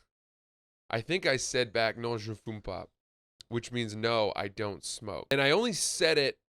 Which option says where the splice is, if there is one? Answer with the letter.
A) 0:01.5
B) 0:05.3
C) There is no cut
B